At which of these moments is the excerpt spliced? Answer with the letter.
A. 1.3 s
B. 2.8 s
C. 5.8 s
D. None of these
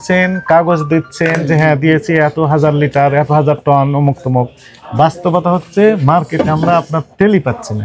D